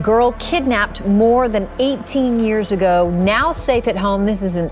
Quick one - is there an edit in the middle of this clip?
no; 0 cuts

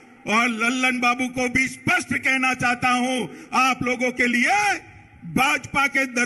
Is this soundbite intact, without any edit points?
yes; 0 cuts

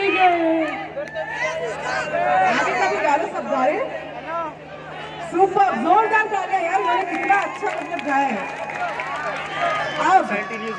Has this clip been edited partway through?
no; 0 cuts

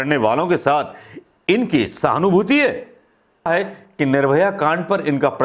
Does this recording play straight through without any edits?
no; 1 cut; at 3.5 s

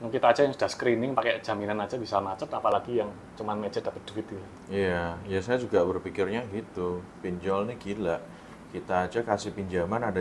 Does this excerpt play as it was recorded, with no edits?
yes; 0 cuts

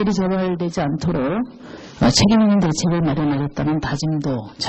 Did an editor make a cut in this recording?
no; 0 cuts

